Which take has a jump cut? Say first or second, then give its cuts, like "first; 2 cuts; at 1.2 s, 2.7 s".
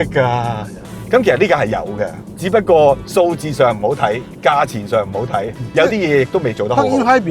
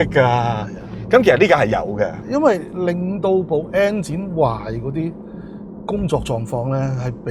second; 1 cut; at 2.2 s